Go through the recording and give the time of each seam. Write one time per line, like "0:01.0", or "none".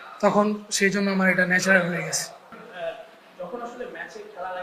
0:02.6